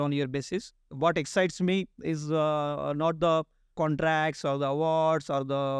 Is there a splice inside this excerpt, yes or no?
yes